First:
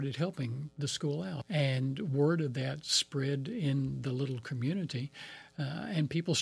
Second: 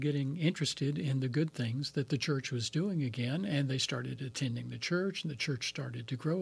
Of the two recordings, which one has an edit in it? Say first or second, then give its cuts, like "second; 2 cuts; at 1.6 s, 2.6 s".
first; 1 cut; at 1.4 s